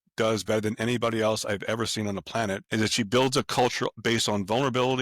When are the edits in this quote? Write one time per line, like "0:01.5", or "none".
0:02.6
0:03.9